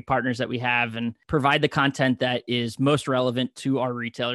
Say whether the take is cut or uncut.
cut